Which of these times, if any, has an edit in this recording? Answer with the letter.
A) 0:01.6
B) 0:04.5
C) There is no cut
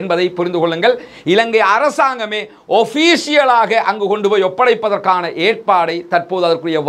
C